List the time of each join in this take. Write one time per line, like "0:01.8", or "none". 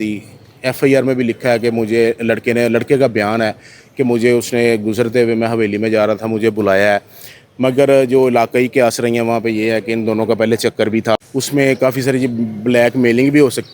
0:11.3